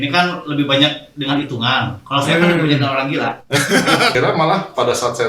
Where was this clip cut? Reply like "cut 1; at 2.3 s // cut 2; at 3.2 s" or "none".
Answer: cut 1; at 4.1 s